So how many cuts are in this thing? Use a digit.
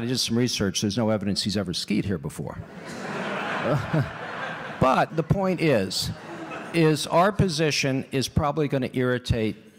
1